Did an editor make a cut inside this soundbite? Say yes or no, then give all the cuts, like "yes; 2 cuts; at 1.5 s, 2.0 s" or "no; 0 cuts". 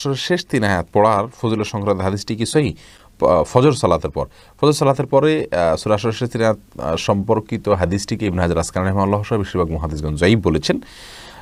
no; 0 cuts